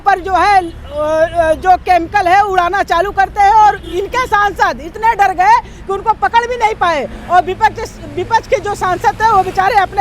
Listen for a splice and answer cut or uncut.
uncut